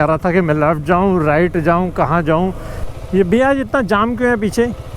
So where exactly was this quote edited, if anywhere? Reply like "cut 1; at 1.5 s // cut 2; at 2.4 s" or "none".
cut 1; at 2.8 s